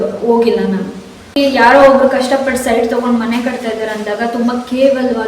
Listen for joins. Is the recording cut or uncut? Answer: cut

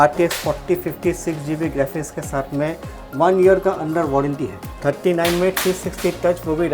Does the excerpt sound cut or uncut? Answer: cut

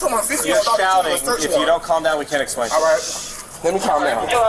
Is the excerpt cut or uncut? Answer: uncut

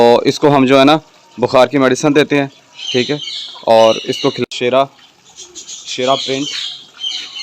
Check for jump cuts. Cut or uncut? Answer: cut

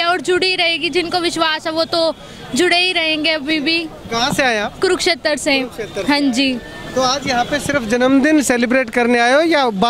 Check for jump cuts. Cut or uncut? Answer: uncut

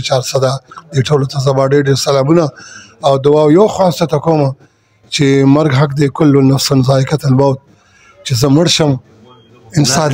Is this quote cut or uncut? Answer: uncut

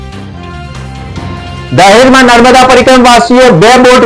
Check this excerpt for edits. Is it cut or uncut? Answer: uncut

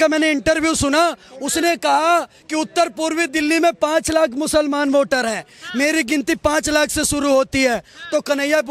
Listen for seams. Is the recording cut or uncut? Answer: uncut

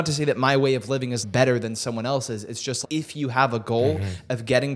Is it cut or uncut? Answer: cut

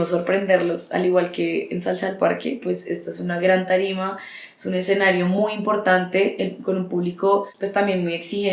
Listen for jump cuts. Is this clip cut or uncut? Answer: cut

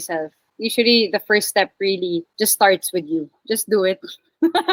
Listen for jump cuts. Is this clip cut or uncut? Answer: uncut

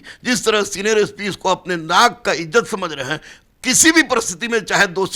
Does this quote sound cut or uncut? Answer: uncut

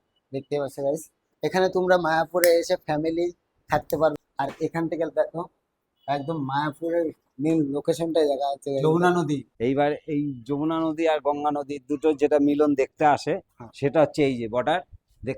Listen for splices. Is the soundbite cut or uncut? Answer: cut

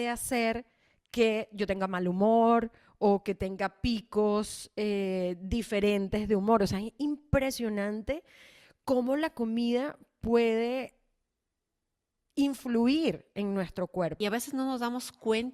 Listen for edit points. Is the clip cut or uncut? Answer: cut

